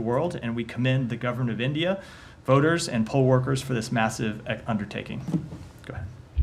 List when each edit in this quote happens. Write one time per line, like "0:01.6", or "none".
none